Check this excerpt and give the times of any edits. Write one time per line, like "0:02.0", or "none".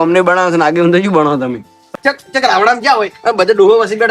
0:01.8